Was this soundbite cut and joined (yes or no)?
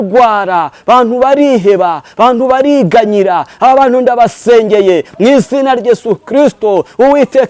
no